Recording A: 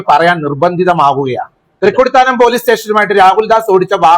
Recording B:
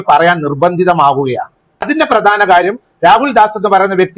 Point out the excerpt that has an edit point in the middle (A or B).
A